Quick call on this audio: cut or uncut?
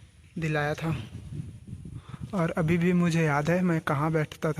uncut